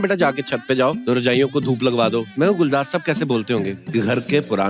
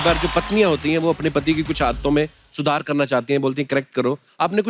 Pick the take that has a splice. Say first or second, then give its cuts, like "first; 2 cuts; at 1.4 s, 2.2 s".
first; 3 cuts; at 1.0 s, 2.3 s, 3.8 s